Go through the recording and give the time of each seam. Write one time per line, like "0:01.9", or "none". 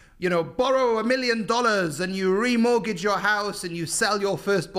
none